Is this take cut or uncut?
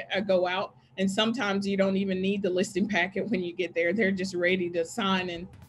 uncut